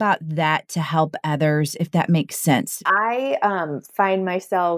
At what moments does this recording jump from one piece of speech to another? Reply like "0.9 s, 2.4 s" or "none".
2.8 s